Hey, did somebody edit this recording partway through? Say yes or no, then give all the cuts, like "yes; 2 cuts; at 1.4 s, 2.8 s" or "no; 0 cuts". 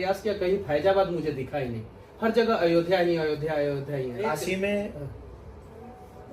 yes; 1 cut; at 4.3 s